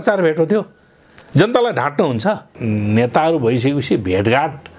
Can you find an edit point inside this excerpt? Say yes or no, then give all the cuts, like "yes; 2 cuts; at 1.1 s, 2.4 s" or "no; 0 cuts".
yes; 1 cut; at 2.5 s